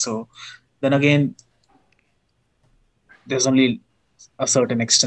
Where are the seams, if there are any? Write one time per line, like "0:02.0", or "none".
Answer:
none